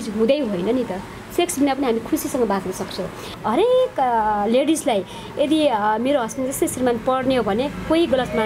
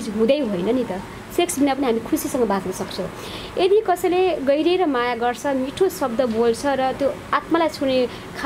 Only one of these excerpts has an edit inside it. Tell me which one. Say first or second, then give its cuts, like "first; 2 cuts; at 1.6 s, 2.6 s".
first; 1 cut; at 3.4 s